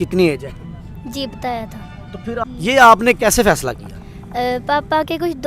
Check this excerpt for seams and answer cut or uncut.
cut